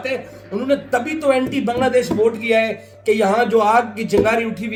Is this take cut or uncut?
uncut